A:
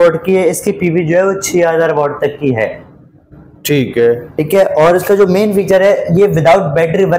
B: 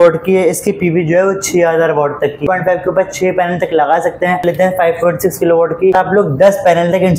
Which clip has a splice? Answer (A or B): B